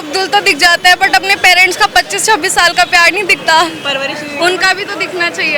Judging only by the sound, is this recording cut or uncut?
uncut